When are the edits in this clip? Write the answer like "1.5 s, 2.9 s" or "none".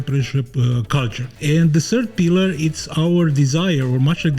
1.2 s